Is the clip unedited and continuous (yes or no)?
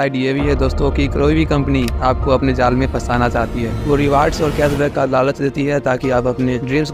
yes